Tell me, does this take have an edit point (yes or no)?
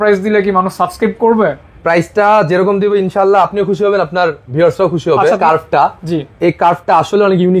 yes